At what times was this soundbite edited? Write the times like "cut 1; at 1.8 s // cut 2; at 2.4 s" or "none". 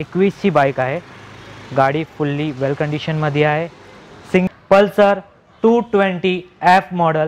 cut 1; at 4.5 s